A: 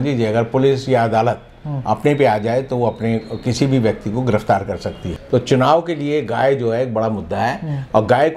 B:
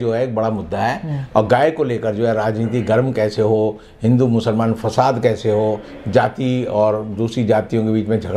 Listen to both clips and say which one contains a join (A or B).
A